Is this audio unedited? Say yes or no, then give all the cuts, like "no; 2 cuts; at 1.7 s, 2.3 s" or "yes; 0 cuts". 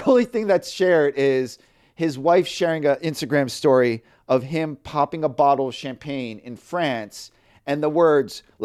yes; 0 cuts